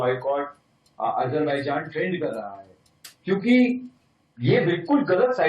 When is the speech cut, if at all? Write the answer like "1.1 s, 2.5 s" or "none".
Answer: none